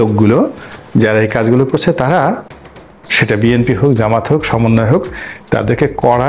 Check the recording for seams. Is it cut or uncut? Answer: cut